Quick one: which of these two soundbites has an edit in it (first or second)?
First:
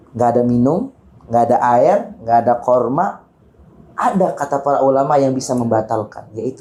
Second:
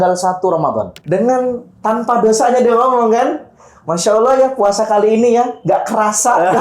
second